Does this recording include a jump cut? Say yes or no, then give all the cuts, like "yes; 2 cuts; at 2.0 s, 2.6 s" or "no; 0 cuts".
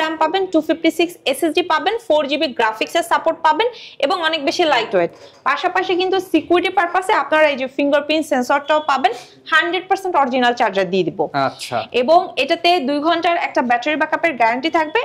no; 0 cuts